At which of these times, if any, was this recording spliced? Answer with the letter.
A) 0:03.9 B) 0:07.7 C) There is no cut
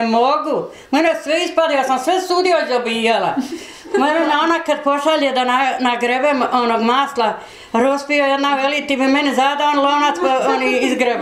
A